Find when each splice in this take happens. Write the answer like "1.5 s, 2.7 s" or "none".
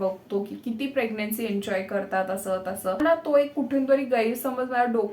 3.0 s